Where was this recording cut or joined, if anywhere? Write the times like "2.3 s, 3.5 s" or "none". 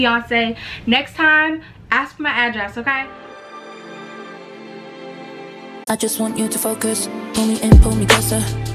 3.1 s

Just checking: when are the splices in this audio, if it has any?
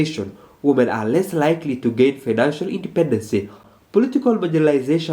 3.6 s

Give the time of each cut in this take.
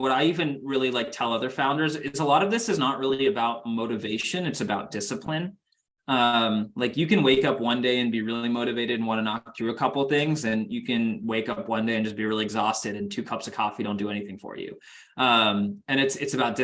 none

